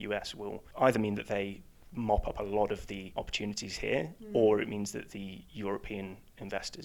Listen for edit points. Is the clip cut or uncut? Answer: cut